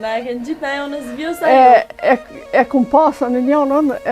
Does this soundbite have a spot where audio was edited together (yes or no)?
no